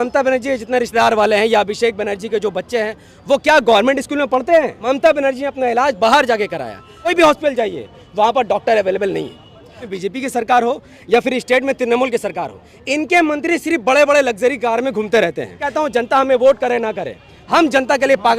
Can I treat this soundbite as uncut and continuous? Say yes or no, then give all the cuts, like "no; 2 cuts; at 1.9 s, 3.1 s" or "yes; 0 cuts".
no; 4 cuts; at 4.8 s, 7.1 s, 9.9 s, 15.7 s